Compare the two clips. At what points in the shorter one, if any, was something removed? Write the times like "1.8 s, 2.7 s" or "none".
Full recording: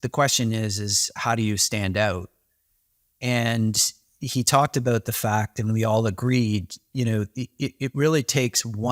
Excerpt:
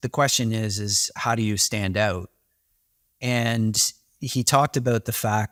none